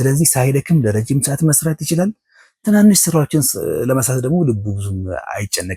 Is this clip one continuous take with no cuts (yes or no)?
yes